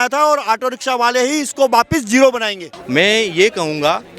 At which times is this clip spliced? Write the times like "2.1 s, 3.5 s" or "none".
2.6 s